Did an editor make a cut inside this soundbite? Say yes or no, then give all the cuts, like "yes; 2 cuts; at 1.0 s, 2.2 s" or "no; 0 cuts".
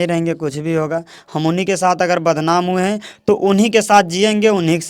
no; 0 cuts